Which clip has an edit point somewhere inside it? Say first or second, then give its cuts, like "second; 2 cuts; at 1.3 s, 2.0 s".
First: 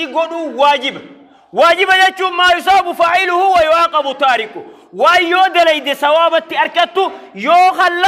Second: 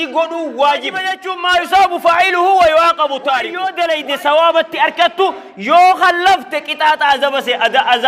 second; 2 cuts; at 1.3 s, 3.6 s